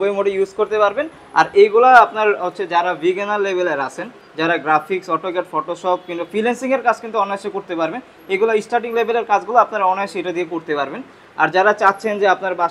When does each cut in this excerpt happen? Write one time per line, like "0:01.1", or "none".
none